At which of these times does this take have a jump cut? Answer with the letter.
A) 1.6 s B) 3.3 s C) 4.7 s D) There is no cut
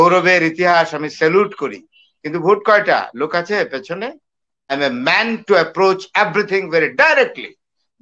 C